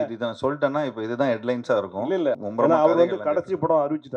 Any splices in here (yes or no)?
yes